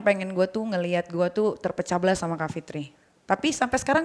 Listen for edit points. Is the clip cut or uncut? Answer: uncut